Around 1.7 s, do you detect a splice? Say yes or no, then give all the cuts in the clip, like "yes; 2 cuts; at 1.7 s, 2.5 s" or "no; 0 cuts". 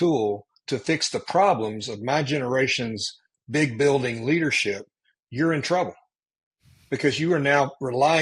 no; 0 cuts